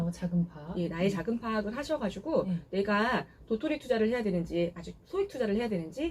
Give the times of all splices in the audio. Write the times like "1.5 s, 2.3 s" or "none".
none